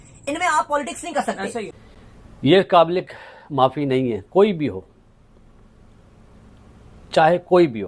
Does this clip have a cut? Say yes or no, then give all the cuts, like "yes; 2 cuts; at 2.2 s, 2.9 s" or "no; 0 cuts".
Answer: yes; 1 cut; at 1.8 s